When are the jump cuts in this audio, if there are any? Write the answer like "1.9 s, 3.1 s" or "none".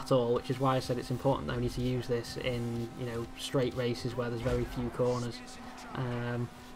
1.5 s